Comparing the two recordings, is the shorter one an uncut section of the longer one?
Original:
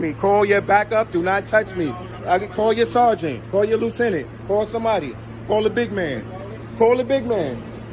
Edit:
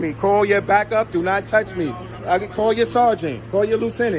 yes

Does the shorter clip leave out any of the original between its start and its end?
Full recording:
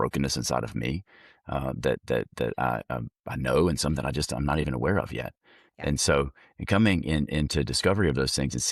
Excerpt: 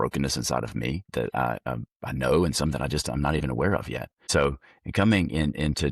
yes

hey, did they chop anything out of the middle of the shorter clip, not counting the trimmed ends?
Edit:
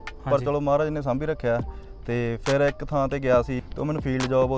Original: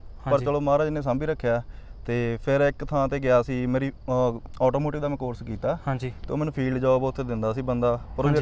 yes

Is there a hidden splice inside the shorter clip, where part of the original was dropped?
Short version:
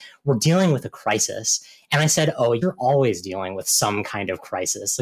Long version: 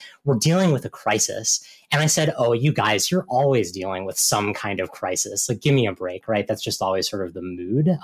yes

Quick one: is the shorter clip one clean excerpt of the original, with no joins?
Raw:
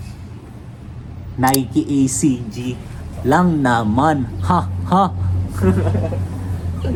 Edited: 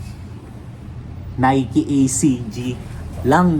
yes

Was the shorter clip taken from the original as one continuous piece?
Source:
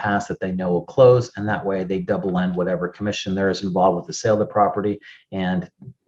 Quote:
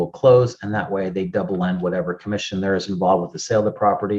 yes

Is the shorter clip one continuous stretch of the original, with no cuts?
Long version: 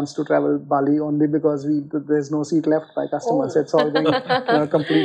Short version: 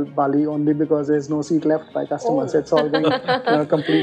no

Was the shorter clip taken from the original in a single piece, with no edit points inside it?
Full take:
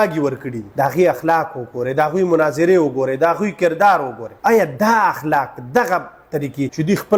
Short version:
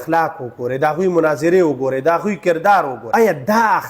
no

